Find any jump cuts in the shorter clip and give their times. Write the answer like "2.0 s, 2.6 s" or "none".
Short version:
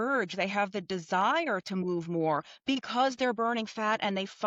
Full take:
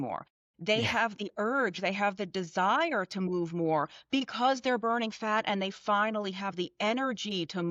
none